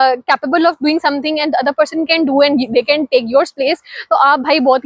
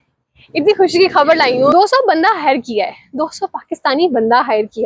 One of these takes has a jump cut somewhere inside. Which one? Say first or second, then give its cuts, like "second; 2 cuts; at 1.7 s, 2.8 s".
second; 1 cut; at 1.7 s